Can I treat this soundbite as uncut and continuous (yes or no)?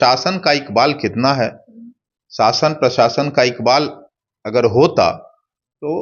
yes